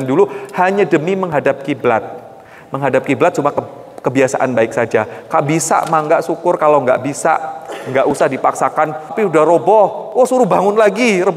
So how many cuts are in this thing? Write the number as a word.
one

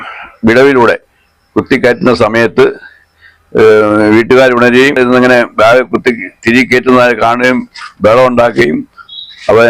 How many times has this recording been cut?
one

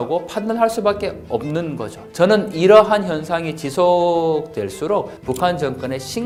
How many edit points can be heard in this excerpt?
zero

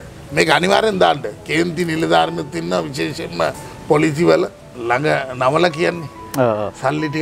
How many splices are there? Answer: one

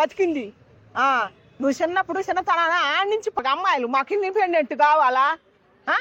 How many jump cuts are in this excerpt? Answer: one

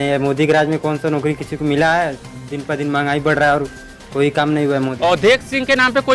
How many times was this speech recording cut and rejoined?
one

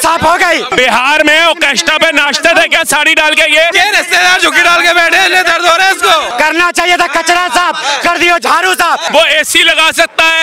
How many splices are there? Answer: four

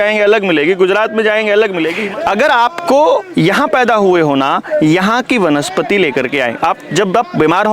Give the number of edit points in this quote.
one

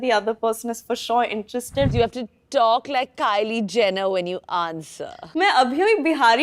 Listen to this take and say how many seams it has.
two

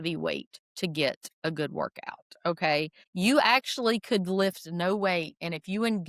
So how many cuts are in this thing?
one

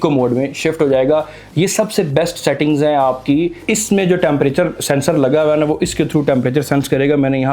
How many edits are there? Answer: one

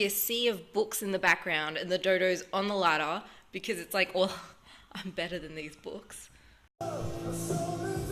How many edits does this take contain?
zero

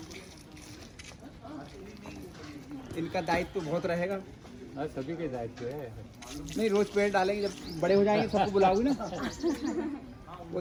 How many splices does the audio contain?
zero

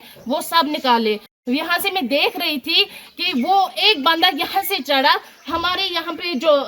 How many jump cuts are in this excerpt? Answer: one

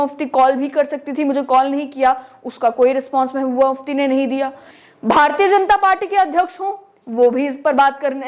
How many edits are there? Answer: one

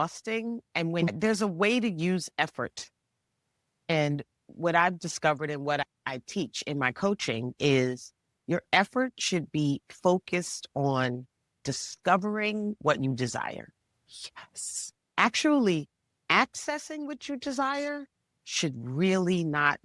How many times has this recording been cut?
one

